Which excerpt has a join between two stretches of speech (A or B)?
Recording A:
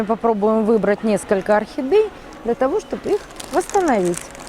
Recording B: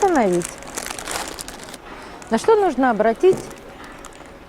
B